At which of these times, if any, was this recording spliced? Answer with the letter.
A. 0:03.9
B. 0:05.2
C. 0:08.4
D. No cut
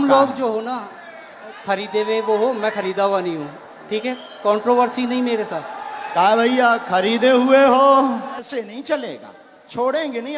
C